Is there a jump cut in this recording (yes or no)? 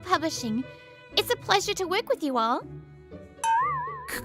no